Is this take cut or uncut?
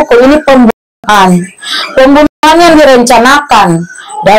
uncut